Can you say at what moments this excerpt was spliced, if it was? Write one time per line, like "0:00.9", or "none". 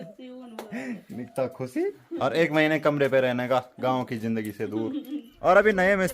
0:02.0
0:05.2